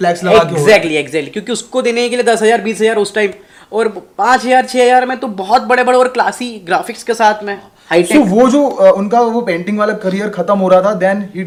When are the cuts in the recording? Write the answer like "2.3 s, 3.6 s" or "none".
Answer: none